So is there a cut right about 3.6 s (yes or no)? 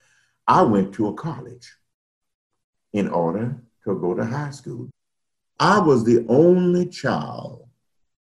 no